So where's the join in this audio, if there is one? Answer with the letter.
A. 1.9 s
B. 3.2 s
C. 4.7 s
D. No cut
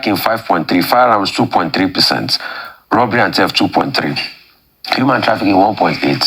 A